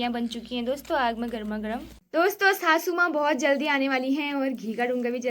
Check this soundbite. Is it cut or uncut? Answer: cut